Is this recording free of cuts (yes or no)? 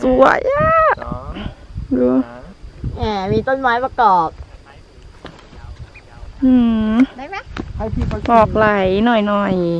yes